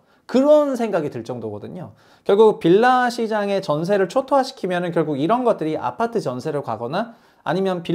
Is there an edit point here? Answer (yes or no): no